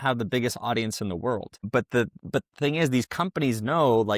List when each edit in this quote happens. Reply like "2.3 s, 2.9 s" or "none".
1.6 s